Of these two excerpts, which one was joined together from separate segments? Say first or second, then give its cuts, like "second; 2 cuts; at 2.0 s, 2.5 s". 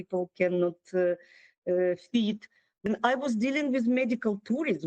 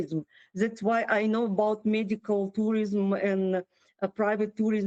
first; 1 cut; at 2.9 s